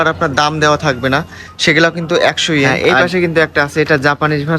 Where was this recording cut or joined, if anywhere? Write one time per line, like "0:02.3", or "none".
0:02.7